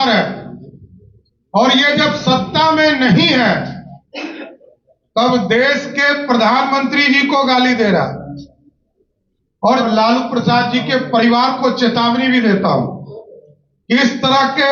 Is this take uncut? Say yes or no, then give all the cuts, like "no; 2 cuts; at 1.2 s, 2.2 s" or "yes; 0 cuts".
no; 1 cut; at 9.8 s